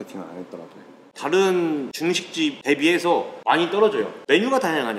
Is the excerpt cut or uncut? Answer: cut